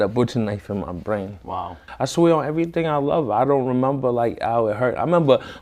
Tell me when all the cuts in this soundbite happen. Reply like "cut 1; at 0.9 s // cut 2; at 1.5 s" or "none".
cut 1; at 1.9 s